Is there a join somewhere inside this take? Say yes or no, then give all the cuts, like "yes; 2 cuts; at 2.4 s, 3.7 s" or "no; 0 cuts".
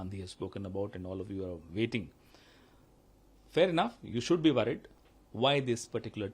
yes; 1 cut; at 4.9 s